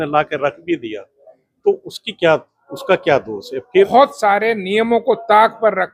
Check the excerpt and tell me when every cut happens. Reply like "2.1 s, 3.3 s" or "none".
3.9 s